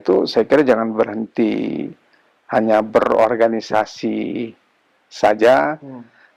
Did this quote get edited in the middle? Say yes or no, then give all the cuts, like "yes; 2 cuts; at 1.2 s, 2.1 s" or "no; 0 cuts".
no; 0 cuts